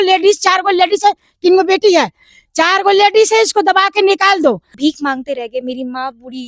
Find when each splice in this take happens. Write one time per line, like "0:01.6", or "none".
0:04.7